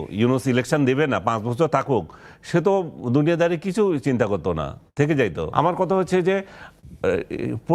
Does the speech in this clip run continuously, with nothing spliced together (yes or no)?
no